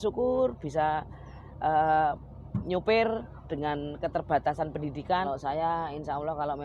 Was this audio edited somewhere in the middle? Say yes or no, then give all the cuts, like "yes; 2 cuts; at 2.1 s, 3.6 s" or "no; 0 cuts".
yes; 1 cut; at 5.3 s